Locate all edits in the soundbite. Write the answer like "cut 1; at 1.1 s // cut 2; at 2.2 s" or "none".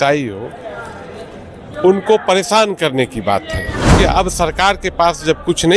cut 1; at 3.9 s